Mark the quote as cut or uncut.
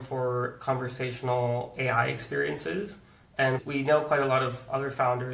uncut